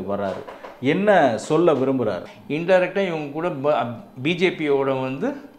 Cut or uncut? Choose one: cut